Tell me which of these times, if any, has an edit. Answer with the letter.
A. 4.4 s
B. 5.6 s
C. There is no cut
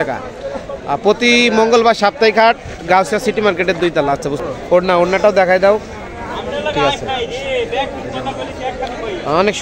A